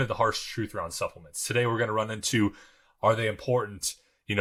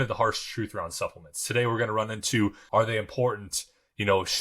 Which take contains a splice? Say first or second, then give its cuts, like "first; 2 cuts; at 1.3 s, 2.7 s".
second; 1 cut; at 2.6 s